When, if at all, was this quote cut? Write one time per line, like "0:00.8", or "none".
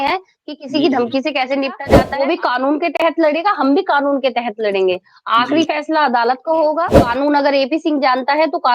0:02.0
0:07.0